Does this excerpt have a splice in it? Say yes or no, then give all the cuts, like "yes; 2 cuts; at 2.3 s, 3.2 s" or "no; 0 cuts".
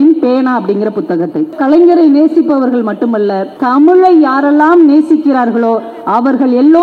yes; 2 cuts; at 1.5 s, 3.5 s